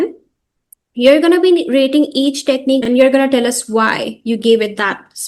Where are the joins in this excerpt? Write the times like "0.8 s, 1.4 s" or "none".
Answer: none